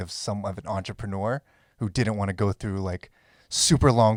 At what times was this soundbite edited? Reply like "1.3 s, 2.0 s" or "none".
none